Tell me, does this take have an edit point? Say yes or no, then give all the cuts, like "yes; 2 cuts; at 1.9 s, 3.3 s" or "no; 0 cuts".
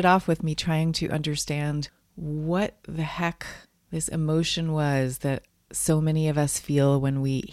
no; 0 cuts